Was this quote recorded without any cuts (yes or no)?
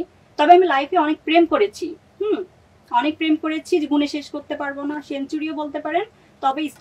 yes